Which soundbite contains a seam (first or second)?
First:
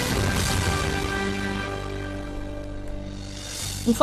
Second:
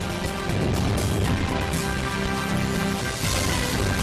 first